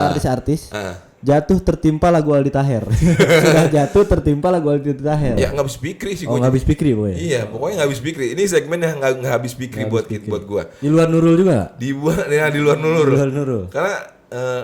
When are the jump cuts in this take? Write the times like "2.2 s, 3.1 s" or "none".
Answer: 5.4 s